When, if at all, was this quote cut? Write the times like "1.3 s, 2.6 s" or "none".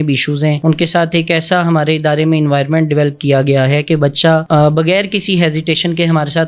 none